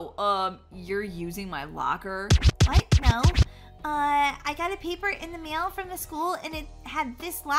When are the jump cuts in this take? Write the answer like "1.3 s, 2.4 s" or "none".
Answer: none

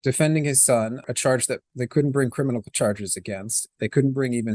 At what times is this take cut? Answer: 1.1 s

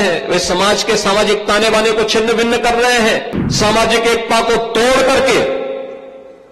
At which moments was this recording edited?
3.4 s

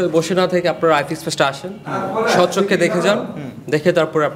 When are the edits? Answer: none

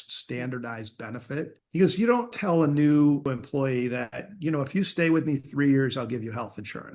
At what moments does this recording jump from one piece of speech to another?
1.6 s, 2.4 s, 3.3 s

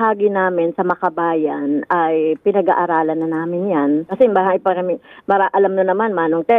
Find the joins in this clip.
4.1 s

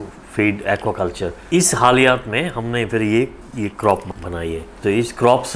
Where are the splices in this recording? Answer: 1.4 s, 4.7 s

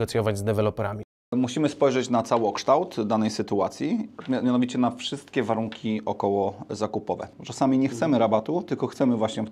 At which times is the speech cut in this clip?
1.3 s, 7.3 s

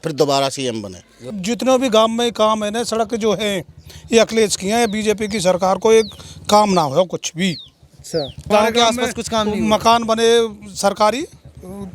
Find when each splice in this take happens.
1.3 s, 8.5 s

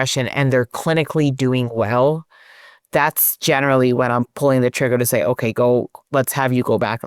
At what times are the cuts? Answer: none

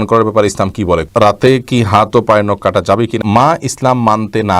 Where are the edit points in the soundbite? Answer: 1.1 s, 3.2 s

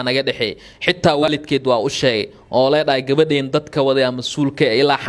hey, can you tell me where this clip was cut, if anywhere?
1.2 s

